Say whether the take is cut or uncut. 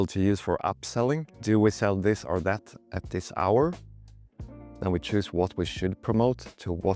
cut